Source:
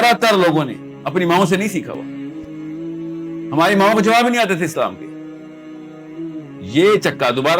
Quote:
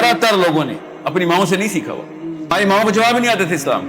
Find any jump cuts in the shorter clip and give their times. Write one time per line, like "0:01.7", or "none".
0:02.5